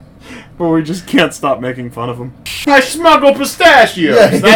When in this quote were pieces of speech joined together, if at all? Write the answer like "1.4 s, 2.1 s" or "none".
2.5 s